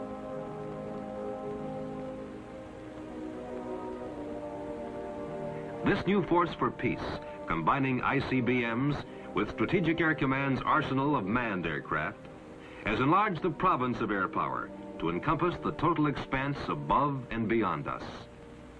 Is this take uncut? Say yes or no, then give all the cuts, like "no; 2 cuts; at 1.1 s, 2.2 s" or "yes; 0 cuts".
yes; 0 cuts